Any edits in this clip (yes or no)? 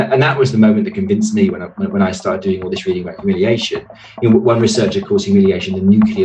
no